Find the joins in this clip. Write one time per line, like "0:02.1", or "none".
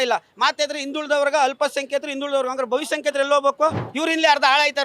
0:03.9